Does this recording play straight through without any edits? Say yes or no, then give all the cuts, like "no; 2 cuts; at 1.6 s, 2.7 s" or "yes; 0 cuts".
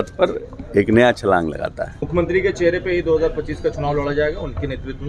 no; 1 cut; at 2.0 s